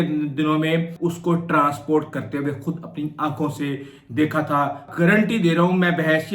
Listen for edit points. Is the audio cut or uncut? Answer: cut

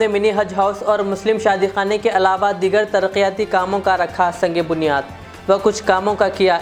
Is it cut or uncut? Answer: uncut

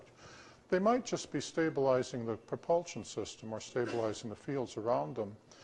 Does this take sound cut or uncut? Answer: cut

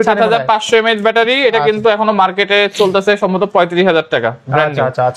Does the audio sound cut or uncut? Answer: uncut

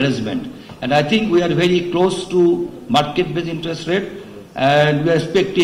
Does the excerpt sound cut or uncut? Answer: uncut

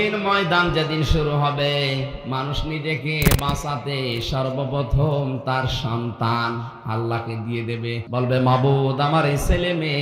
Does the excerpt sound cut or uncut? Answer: cut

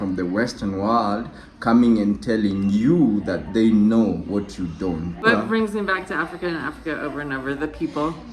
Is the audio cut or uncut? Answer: cut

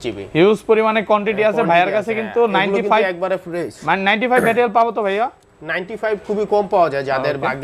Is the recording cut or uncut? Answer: uncut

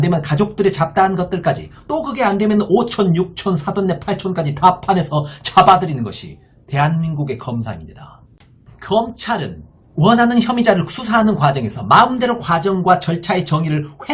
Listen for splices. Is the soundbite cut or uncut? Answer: cut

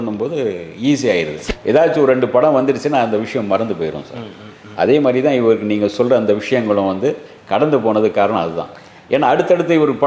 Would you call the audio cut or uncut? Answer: cut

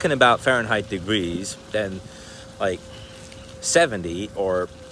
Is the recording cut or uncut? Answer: uncut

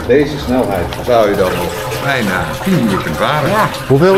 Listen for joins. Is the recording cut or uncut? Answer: uncut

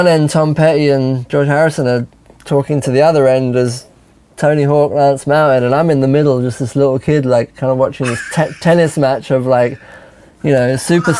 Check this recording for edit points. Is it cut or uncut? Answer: cut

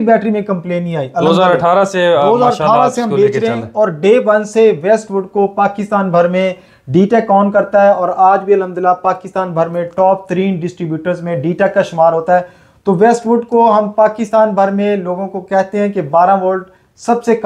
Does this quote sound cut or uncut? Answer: uncut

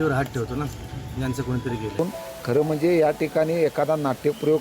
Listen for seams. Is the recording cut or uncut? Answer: cut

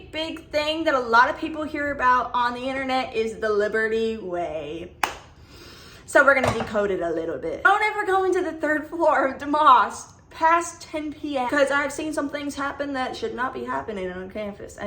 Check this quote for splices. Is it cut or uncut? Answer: cut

